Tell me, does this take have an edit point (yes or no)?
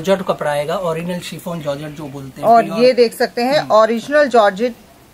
no